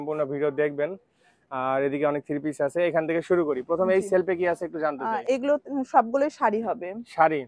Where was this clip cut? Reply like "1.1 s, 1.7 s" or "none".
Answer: none